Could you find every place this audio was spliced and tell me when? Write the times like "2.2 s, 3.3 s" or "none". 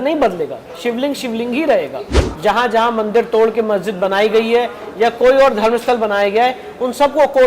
2.2 s